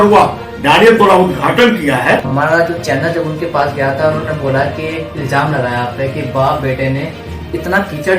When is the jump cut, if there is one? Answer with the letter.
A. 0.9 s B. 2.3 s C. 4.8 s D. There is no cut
B